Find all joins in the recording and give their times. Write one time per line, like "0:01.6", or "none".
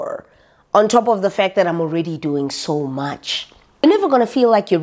0:03.8

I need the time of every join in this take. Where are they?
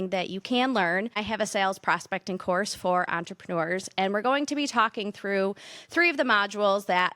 0:01.2

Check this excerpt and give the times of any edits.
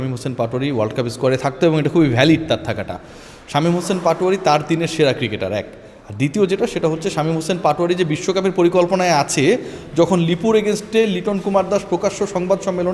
none

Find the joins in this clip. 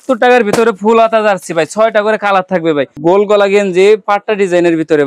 0:02.9

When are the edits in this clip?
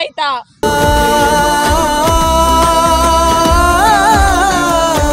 none

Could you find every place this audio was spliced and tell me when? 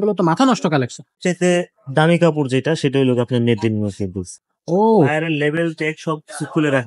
0:01.2
0:04.3

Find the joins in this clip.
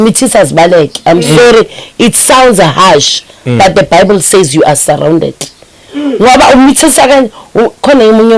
none

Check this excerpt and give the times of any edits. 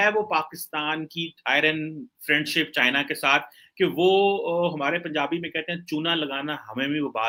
none

